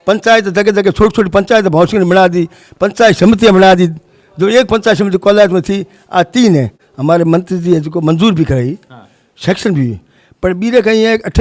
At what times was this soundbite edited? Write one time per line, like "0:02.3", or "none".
0:06.8